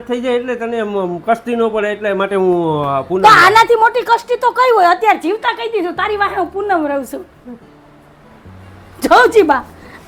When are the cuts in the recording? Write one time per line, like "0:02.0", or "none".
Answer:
none